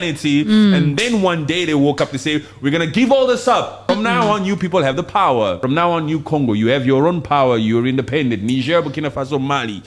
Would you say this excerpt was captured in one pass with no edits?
no; 2 cuts; at 3.8 s, 5.6 s

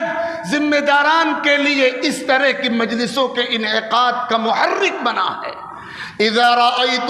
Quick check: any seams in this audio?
no; 0 cuts

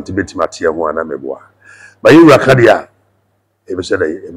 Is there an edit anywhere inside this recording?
no; 0 cuts

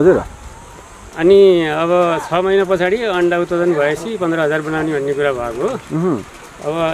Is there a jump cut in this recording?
no; 0 cuts

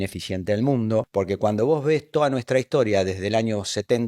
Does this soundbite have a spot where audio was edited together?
yes; 1 cut; at 1.1 s

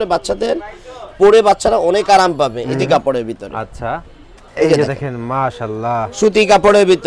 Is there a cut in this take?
yes; 1 cut; at 2.9 s

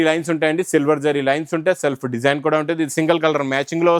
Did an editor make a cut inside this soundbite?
no; 0 cuts

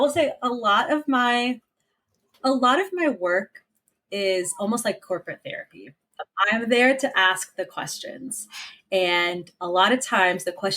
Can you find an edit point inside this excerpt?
yes; 1 cut; at 6.3 s

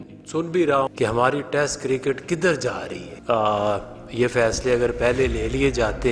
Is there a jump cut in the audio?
yes; 2 cuts; at 0.9 s, 3.1 s

